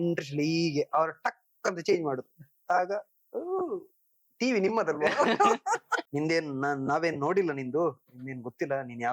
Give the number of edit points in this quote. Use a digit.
1